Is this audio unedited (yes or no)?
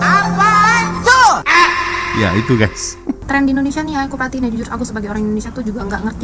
no